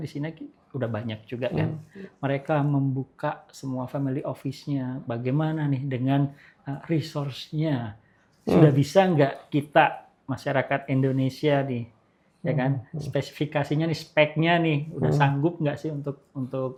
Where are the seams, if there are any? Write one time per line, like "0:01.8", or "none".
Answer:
none